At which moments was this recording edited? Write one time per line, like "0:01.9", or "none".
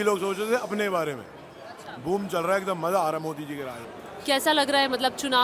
none